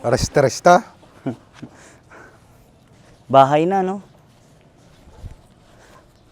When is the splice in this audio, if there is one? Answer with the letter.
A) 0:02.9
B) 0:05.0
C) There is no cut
A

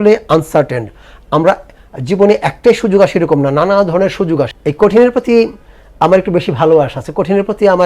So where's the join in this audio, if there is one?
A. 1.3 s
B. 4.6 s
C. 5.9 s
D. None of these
B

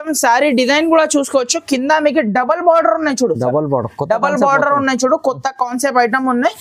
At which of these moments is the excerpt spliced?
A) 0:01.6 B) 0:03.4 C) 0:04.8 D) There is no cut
D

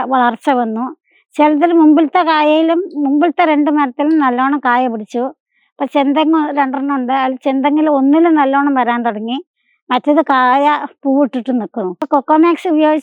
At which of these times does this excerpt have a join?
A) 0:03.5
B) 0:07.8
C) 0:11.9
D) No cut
C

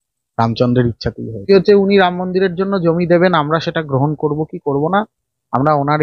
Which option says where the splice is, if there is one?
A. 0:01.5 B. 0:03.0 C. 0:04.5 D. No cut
A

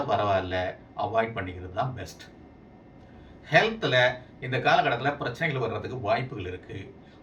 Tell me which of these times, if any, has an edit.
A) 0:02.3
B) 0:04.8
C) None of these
C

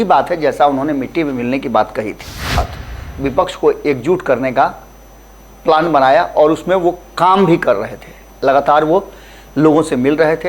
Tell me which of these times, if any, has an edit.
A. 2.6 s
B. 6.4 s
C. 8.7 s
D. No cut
A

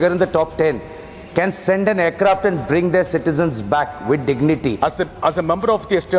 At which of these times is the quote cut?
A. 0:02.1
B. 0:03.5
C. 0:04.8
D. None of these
C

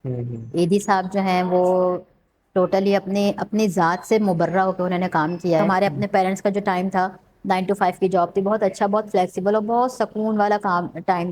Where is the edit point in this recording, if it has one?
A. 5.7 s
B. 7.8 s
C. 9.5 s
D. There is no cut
A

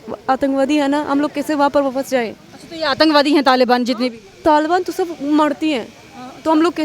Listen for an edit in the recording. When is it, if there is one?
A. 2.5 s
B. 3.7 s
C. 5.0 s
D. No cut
D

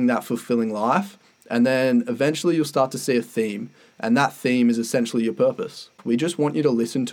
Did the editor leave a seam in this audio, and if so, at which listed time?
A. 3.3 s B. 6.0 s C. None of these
B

